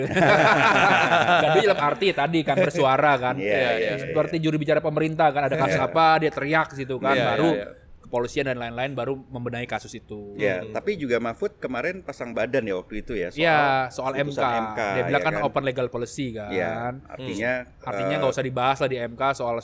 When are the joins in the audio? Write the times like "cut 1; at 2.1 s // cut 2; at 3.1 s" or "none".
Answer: none

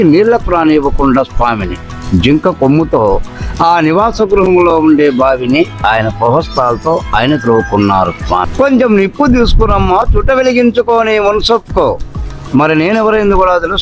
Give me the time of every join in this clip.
cut 1; at 8.5 s

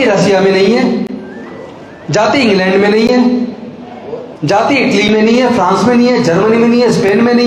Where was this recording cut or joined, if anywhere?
none

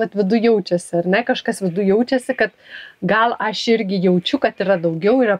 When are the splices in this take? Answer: none

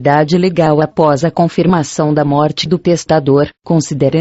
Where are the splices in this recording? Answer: none

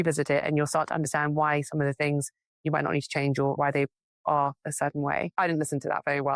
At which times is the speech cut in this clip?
cut 1; at 3.6 s // cut 2; at 5.3 s

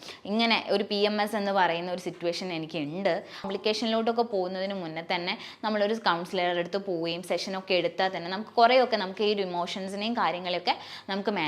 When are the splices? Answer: cut 1; at 3.5 s

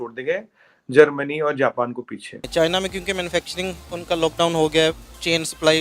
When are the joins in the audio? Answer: cut 1; at 2.4 s

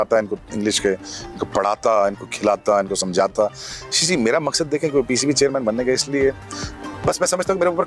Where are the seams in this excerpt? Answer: none

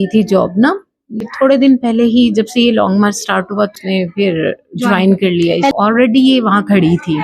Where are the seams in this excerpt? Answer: cut 1; at 1.3 s // cut 2; at 3.8 s // cut 3; at 5.7 s

